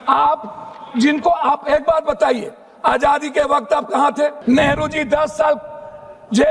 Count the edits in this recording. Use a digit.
1